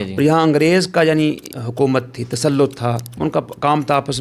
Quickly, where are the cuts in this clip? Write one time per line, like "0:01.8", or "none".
0:01.5
0:03.1